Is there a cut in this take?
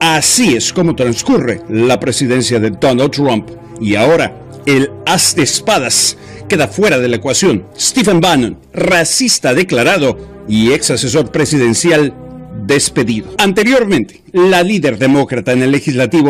no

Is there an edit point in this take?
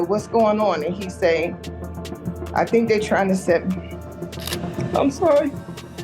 yes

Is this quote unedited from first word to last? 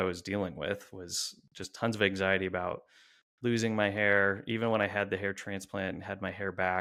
yes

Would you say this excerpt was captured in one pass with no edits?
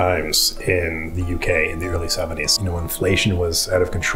no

